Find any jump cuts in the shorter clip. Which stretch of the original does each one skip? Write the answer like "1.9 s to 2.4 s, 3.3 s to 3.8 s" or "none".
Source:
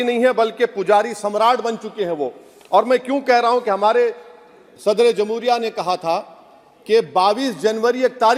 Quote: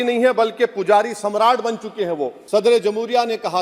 2.3 s to 4.7 s